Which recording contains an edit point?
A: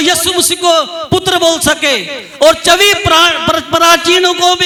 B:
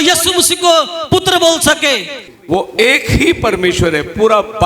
B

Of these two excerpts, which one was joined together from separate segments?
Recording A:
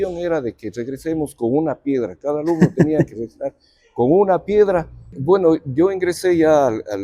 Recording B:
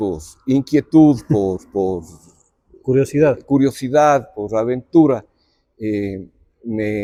A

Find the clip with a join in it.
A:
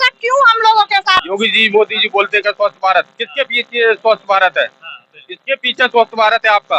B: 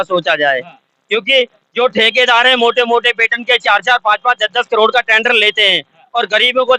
A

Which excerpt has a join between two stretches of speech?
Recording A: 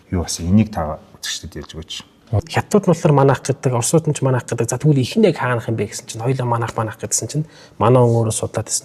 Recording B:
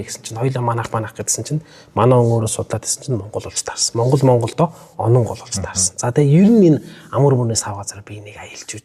A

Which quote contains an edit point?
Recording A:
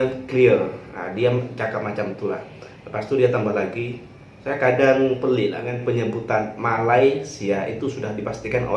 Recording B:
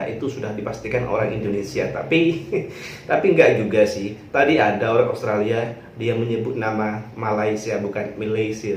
A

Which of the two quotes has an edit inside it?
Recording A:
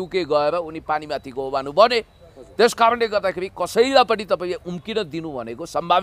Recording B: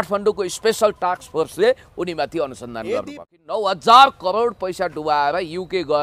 B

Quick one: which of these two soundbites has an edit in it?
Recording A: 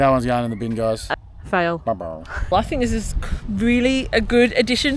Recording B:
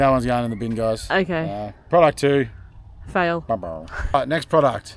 A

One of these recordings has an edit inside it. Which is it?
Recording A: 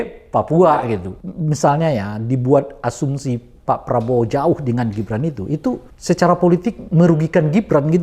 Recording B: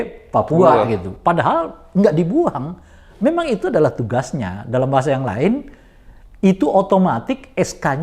A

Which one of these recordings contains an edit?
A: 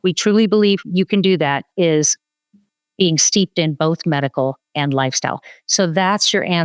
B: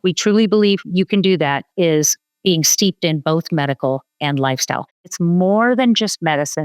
B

